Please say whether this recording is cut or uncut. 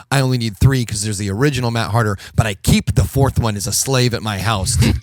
uncut